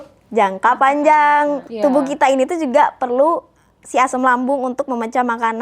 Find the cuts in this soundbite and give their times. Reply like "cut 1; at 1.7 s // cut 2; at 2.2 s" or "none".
cut 1; at 1.6 s